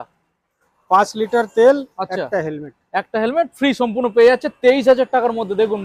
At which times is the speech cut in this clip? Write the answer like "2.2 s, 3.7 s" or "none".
none